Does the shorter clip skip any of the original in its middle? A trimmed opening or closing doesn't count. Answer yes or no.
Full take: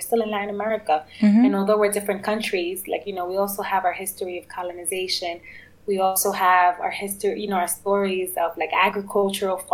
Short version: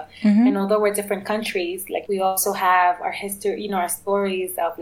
yes